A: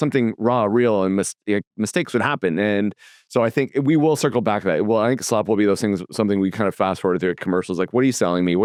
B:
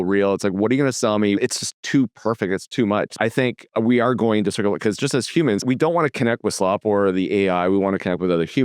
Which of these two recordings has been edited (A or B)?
B